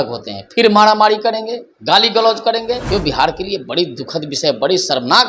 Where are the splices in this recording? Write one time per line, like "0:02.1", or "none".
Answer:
0:02.8